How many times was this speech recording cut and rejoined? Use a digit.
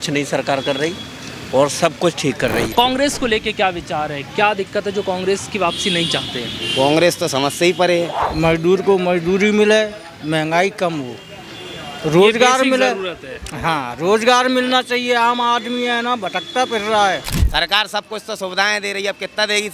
3